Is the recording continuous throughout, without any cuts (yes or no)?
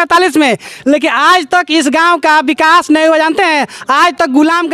yes